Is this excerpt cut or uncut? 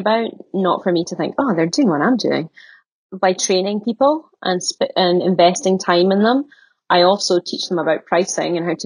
cut